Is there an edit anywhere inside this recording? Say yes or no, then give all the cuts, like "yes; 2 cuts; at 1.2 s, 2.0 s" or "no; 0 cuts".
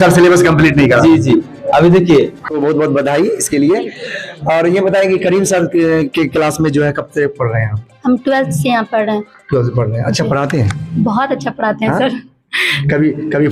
yes; 1 cut; at 2.4 s